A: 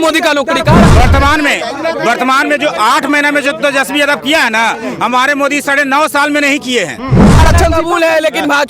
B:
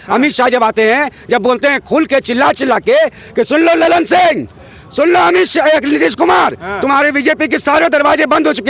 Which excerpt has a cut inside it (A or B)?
A